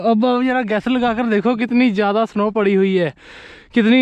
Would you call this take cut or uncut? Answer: uncut